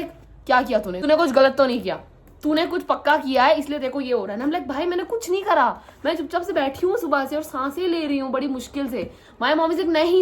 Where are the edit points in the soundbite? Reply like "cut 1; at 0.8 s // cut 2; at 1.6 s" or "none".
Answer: cut 1; at 0.9 s